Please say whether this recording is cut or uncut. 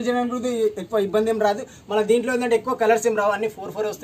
uncut